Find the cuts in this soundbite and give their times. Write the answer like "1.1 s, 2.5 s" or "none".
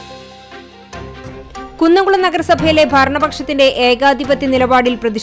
1.4 s

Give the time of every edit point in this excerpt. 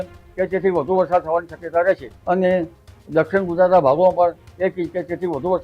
2.1 s

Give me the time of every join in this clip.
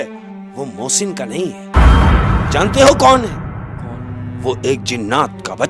none

